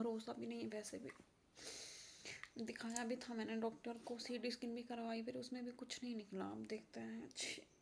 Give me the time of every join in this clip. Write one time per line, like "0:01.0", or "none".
none

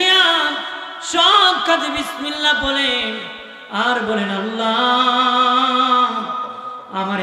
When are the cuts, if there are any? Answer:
none

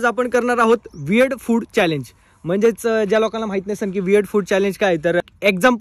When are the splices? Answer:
none

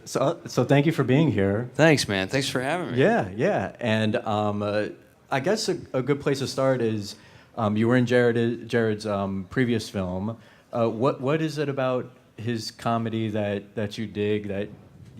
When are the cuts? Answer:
0:13.4

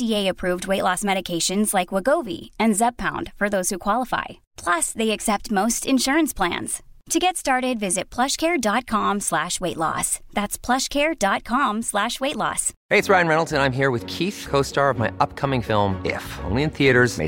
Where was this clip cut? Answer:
0:12.7

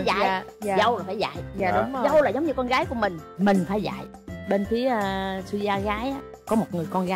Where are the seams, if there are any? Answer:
none

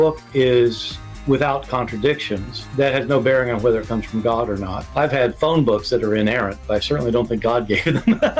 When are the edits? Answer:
0:07.4

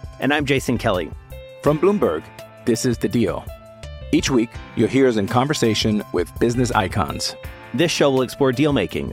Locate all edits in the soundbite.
none

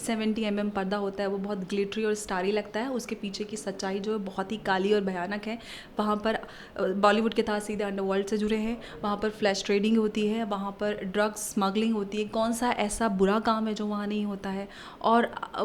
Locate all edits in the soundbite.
none

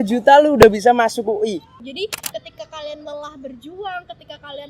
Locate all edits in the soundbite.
0:01.8

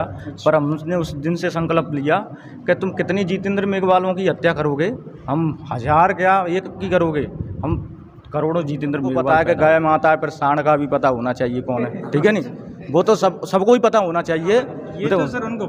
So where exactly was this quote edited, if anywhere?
0:09.2

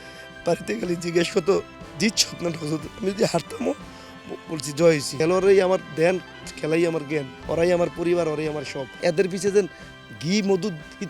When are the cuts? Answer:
0:05.1
0:09.0

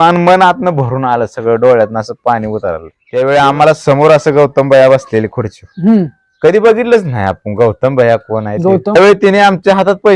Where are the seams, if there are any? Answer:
0:02.9
0:09.0

